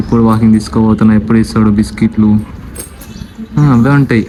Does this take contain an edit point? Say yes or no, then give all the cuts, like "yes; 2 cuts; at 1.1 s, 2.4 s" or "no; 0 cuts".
no; 0 cuts